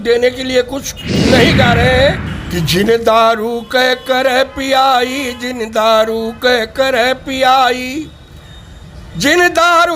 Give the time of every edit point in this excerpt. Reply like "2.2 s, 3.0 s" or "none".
2.3 s